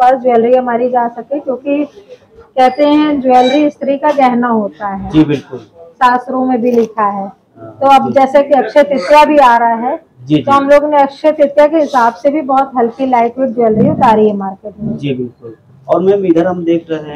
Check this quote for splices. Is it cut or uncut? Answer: uncut